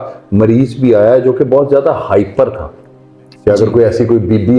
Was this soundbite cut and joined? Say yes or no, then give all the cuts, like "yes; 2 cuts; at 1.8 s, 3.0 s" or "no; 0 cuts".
no; 0 cuts